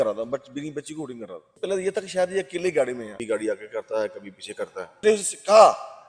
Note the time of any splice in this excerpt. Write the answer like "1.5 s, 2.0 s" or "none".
1.6 s, 3.1 s, 5.0 s